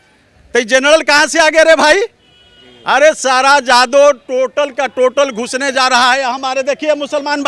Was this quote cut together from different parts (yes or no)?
no